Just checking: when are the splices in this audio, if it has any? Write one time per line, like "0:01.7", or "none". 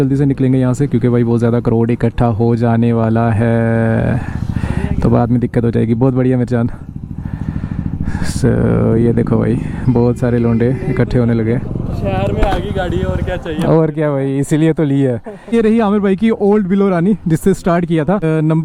none